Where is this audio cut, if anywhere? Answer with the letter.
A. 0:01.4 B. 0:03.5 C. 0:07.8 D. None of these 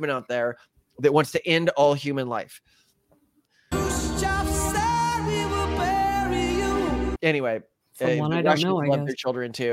B